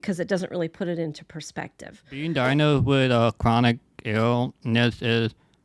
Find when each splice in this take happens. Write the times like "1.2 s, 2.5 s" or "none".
2.3 s